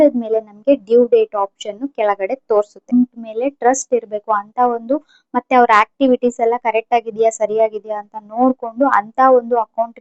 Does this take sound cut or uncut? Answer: cut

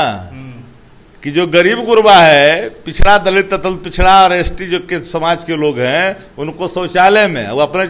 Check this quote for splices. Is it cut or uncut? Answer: uncut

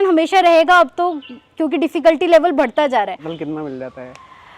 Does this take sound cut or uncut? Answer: cut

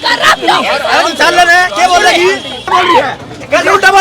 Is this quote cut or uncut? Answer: cut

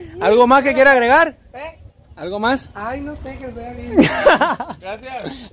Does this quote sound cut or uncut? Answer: uncut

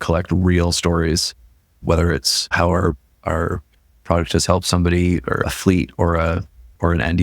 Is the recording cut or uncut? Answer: cut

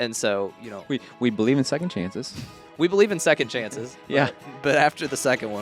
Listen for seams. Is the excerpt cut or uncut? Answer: uncut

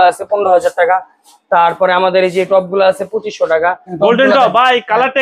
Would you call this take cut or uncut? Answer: cut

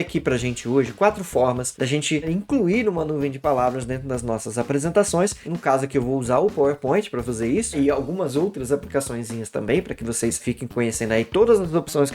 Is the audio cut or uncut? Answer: cut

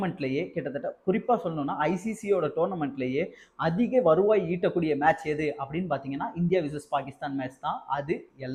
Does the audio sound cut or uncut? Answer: uncut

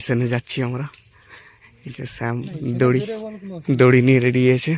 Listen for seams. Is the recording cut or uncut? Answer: uncut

